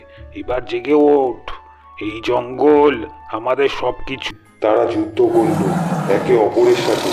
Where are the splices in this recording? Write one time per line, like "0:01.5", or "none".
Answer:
0:04.3

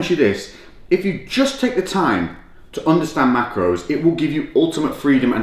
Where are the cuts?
none

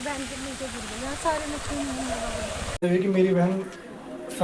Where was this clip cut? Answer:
0:02.8

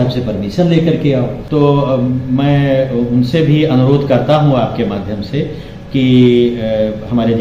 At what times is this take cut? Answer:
0:01.4

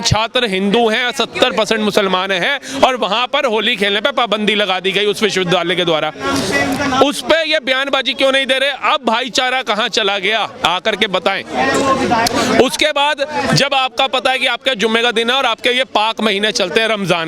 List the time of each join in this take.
none

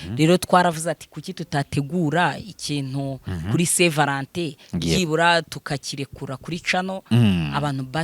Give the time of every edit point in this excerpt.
none

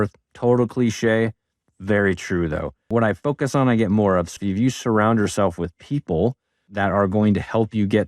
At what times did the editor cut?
0:02.9
0:04.4

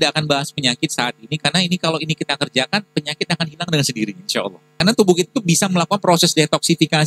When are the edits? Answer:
0:04.7

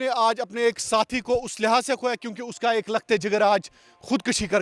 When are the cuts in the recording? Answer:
none

